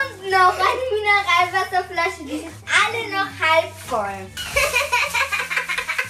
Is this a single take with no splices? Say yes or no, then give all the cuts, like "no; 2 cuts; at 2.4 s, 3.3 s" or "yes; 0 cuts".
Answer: no; 1 cut; at 4.6 s